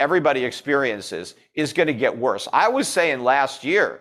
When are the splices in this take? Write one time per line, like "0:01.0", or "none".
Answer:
none